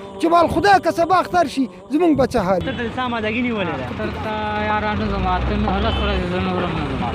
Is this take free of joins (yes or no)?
no